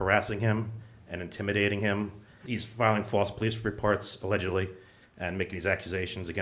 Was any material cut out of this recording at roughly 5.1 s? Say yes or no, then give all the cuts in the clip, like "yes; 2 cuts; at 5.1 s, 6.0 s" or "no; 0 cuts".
no; 1 cut; at 2.4 s